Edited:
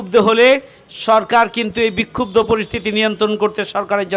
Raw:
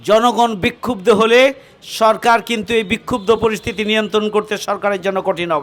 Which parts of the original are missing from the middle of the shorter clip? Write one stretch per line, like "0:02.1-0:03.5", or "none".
none